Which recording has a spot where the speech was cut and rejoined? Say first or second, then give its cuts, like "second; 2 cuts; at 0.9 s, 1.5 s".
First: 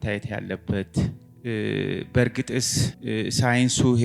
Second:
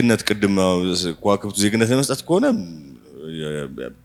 first; 2 cuts; at 1.3 s, 3.0 s